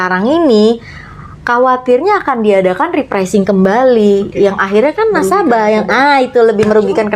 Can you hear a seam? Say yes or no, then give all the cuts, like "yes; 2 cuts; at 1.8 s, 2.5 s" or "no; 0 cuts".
no; 0 cuts